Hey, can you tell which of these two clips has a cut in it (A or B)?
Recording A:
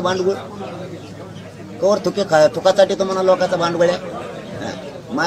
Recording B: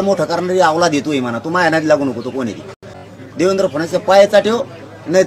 B